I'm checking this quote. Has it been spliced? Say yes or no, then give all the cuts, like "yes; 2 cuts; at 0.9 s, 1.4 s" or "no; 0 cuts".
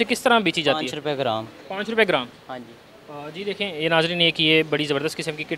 no; 0 cuts